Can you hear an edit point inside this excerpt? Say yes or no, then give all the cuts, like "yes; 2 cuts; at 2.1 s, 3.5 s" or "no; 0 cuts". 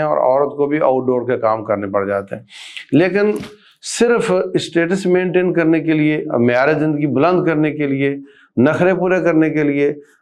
no; 0 cuts